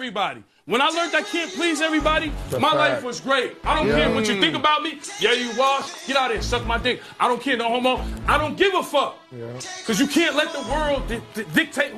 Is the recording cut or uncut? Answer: uncut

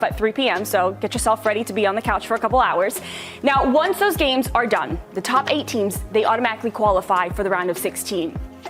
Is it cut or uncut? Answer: cut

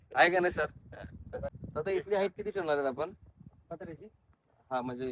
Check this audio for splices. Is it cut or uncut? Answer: cut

